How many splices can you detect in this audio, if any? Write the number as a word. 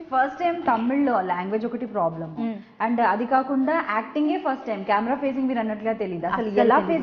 zero